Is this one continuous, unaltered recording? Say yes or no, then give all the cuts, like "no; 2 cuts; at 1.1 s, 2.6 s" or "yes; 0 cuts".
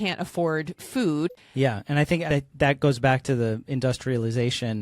no; 2 cuts; at 1.4 s, 2.3 s